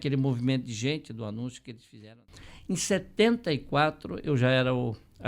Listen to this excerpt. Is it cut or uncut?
cut